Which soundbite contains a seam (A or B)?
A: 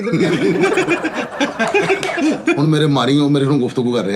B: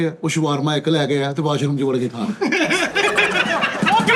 A